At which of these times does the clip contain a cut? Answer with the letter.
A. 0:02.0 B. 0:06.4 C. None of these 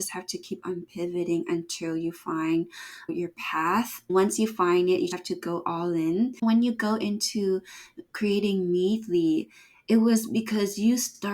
B